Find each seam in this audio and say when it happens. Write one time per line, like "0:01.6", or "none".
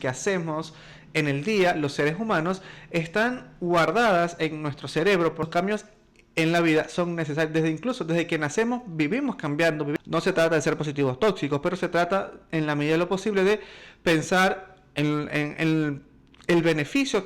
0:05.5
0:09.9